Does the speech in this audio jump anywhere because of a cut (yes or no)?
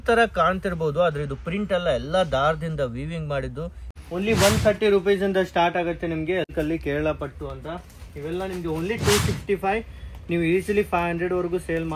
yes